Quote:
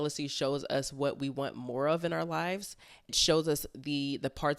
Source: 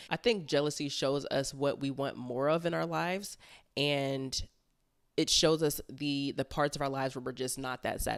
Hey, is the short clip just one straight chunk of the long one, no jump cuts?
no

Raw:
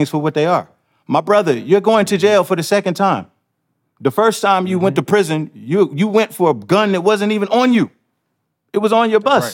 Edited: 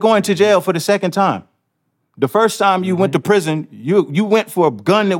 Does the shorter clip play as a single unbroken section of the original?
yes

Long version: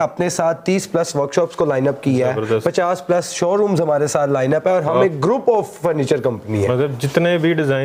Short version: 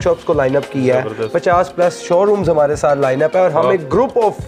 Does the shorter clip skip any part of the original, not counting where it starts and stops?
no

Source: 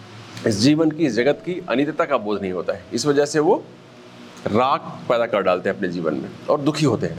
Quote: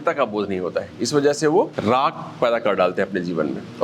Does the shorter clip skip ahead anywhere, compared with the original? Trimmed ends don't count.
yes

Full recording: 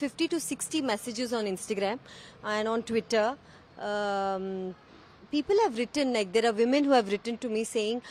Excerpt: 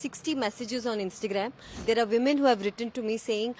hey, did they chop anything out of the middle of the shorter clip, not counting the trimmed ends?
yes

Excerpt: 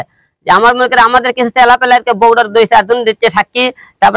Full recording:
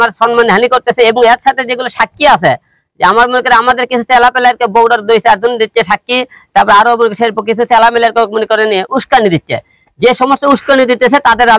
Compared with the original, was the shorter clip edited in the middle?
no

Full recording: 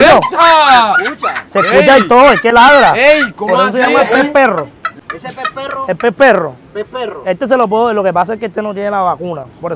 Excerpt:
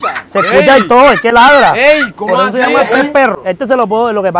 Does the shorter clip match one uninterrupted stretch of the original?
no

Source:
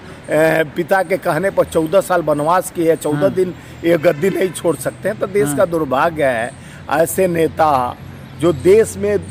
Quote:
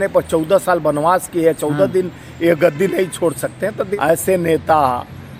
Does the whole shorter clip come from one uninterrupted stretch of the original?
no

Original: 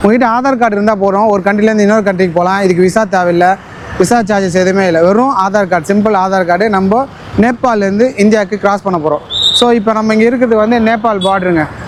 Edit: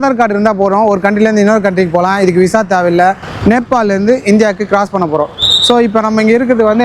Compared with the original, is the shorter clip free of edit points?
no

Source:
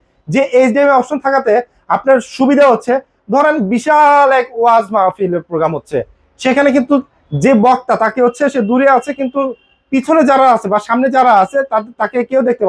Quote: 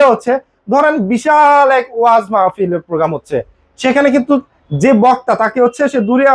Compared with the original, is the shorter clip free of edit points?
yes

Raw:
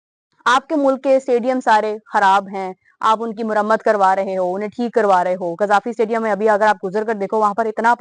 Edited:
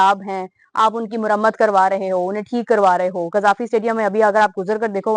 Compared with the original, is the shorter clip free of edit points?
yes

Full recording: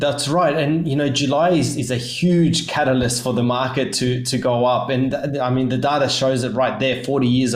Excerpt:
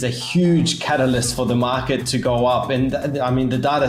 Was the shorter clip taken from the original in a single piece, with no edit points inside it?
no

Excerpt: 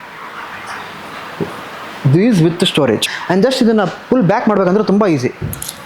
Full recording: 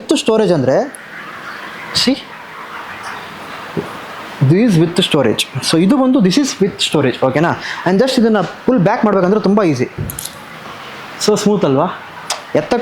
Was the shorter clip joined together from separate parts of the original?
yes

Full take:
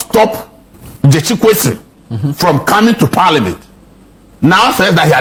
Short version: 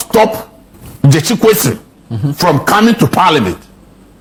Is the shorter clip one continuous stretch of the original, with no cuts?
yes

